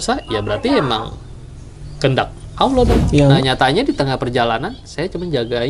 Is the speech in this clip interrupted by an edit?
yes; 1 cut; at 3.4 s

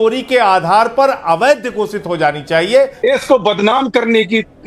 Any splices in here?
yes; 1 cut; at 2.9 s

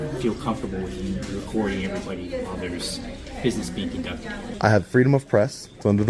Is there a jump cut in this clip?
yes; 1 cut; at 4.4 s

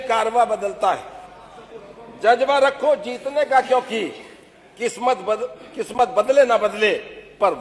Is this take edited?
no; 0 cuts

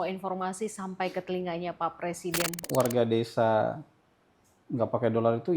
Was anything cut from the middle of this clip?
yes; 1 cut; at 2.6 s

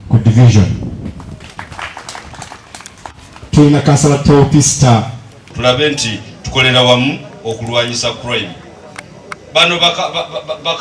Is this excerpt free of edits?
no; 1 cut; at 5.4 s

